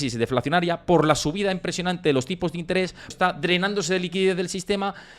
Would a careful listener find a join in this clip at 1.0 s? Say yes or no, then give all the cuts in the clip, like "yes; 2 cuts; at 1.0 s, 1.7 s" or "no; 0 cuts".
no; 1 cut; at 3.1 s